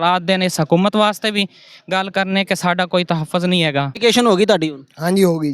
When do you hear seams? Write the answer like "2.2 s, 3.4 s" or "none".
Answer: 3.9 s